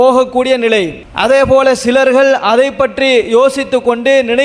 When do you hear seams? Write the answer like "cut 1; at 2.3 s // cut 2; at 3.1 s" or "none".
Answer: cut 1; at 1.0 s